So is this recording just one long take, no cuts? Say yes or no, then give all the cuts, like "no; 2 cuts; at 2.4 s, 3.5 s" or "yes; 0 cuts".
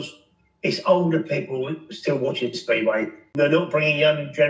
no; 1 cut; at 3.2 s